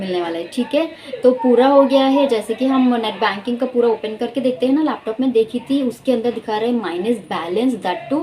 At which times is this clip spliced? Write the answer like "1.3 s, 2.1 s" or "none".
none

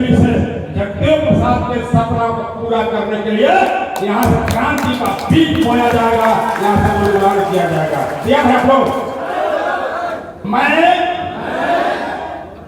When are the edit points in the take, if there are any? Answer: 10.3 s

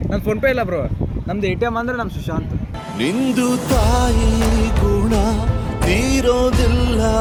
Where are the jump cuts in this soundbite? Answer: none

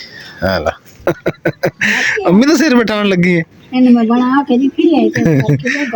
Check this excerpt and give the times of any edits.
0.9 s

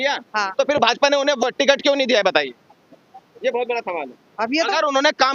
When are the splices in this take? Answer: 1.4 s

